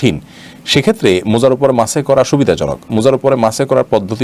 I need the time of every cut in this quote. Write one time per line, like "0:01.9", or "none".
none